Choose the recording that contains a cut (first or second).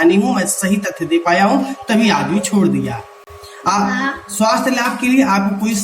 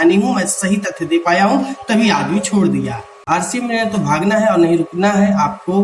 second